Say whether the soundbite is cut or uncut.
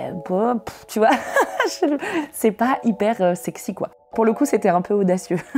cut